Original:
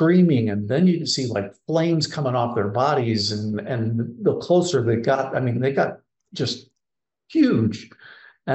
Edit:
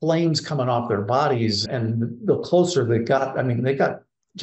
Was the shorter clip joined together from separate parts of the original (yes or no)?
yes